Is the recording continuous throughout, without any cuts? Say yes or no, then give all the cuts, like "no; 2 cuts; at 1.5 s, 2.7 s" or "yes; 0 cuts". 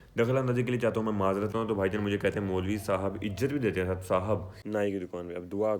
no; 2 cuts; at 1.5 s, 4.5 s